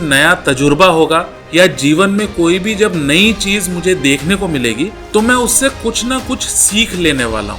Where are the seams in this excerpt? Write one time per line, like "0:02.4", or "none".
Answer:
0:01.4
0:05.0